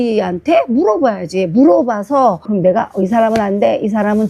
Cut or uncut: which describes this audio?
cut